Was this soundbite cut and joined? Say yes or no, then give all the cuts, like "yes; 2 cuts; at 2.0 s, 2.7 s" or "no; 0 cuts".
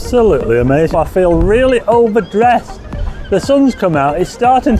yes; 1 cut; at 0.9 s